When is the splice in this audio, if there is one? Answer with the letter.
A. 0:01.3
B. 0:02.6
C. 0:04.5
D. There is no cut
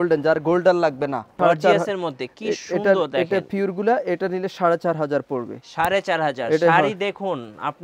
A